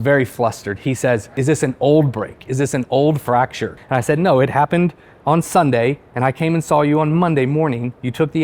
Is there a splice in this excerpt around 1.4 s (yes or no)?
yes